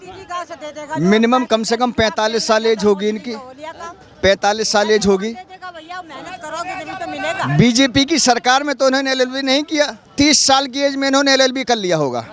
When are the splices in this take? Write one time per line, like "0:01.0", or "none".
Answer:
0:10.1